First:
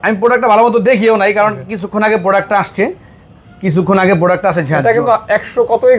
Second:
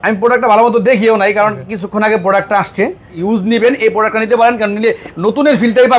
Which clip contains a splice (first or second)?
second